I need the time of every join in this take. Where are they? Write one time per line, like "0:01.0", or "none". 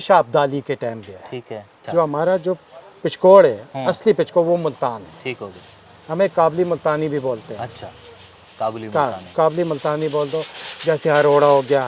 0:01.8